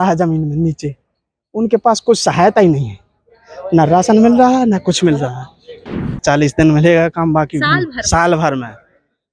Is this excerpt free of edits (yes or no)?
no